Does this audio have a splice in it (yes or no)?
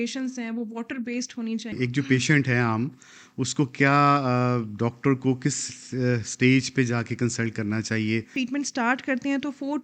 yes